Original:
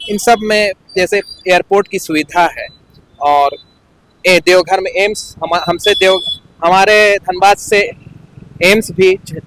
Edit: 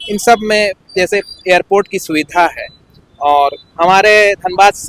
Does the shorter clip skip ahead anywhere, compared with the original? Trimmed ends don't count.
yes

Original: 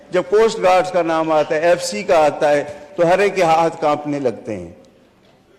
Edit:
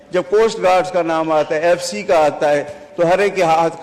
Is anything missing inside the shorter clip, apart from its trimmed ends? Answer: no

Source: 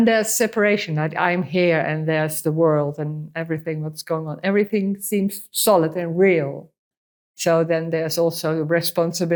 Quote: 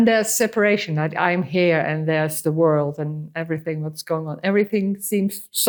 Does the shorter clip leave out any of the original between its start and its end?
no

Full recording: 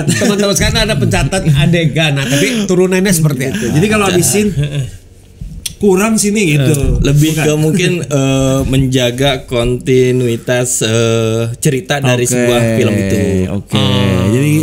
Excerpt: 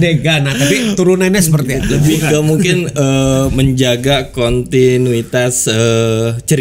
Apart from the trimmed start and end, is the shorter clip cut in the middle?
yes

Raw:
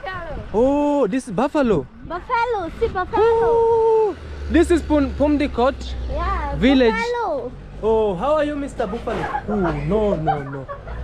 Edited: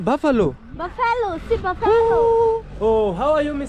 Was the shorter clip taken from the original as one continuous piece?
no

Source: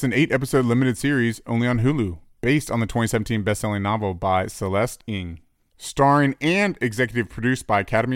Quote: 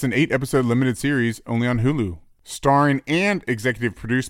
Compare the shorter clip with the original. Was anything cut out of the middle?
yes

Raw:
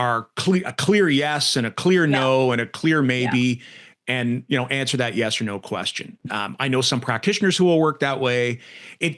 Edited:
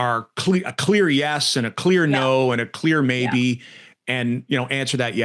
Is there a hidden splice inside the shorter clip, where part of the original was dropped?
no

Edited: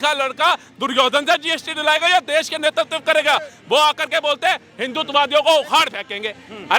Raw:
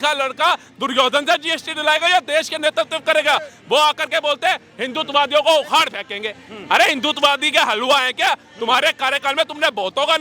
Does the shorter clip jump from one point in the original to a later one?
no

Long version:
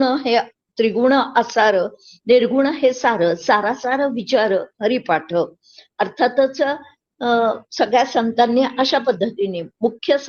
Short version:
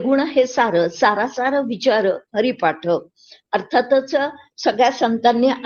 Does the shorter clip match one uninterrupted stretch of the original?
no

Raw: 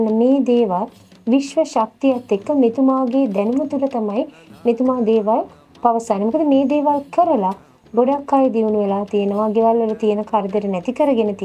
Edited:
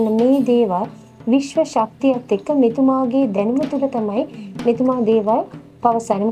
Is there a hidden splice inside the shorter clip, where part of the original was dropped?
no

